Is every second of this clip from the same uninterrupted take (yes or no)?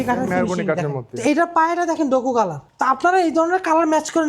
no